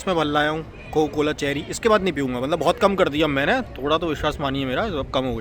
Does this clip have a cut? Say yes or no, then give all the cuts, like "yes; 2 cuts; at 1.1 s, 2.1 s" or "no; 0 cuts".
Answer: no; 0 cuts